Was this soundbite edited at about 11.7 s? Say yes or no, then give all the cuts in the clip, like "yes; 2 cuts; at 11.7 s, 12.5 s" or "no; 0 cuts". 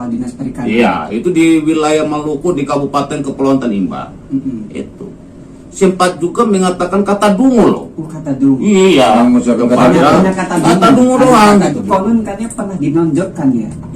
yes; 1 cut; at 11.7 s